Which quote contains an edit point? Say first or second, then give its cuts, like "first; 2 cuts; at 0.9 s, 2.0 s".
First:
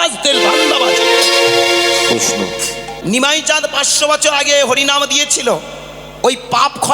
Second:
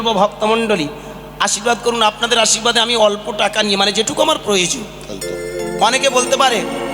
first; 1 cut; at 2.9 s